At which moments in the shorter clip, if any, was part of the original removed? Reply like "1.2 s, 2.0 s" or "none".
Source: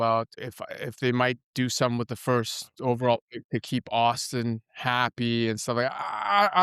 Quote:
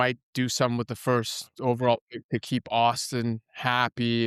none